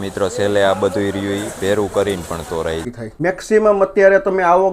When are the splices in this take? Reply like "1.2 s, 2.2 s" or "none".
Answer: 3.0 s